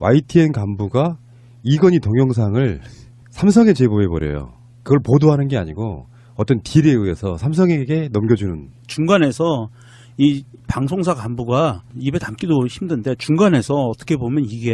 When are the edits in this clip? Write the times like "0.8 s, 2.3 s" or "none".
13.0 s